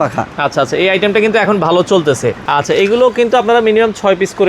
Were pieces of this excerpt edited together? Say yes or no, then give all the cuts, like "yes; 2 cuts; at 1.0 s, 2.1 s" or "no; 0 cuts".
yes; 1 cut; at 2.4 s